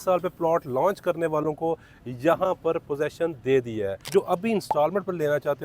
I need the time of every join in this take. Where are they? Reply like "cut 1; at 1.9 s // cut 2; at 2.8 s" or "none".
cut 1; at 4.0 s